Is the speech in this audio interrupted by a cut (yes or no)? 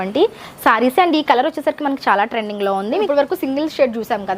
yes